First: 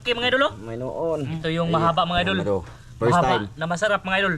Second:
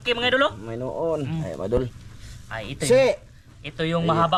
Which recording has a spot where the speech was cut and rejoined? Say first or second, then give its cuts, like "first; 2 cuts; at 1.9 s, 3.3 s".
first; 1 cut; at 1.3 s